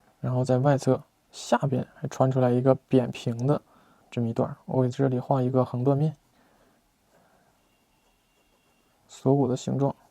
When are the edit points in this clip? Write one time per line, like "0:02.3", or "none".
0:06.3
0:08.9